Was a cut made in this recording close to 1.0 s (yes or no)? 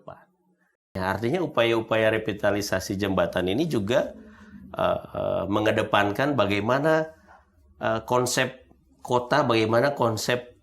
yes